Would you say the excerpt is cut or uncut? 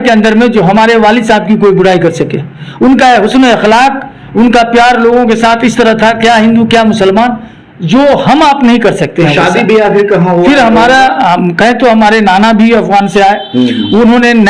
uncut